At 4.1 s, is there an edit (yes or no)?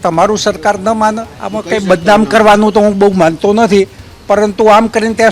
no